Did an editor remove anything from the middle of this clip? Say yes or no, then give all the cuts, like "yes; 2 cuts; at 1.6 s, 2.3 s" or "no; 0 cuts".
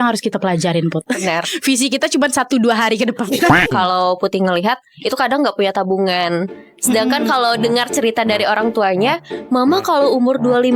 yes; 1 cut; at 3.7 s